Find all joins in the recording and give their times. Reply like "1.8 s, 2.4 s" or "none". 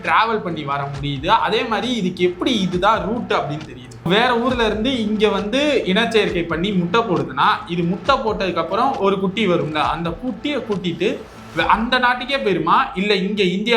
4.1 s